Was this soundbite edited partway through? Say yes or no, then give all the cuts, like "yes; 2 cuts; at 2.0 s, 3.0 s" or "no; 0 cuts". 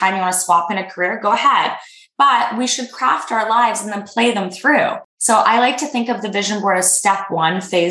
yes; 1 cut; at 5.1 s